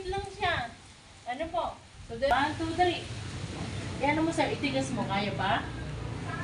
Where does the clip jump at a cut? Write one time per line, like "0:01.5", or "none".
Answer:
0:02.3